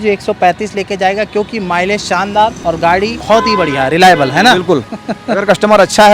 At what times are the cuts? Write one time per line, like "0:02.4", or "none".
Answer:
0:02.8
0:05.0